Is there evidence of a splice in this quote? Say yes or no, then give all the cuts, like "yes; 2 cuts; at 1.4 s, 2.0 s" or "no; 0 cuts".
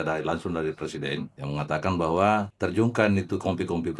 yes; 2 cuts; at 1.4 s, 2.5 s